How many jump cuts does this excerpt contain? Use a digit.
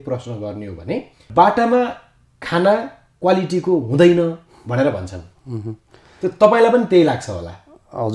1